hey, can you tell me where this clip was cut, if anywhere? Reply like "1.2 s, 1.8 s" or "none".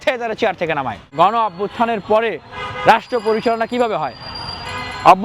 1.0 s